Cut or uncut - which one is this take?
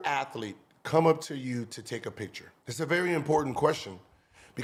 uncut